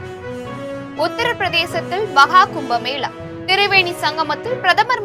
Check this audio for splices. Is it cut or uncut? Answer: uncut